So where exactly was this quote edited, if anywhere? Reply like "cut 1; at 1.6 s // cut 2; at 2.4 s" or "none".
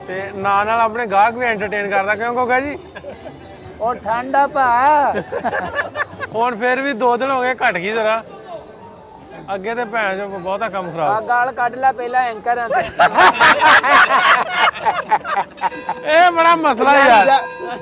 cut 1; at 6.3 s